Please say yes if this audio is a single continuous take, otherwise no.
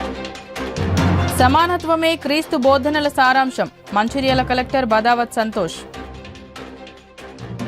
no